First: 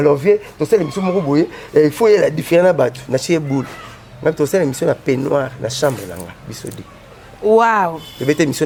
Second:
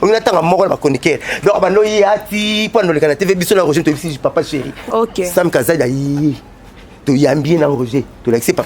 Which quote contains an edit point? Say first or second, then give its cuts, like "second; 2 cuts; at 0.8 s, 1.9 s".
second; 1 cut; at 4.9 s